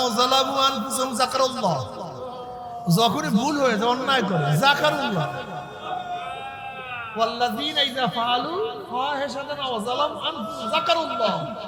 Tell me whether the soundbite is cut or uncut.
uncut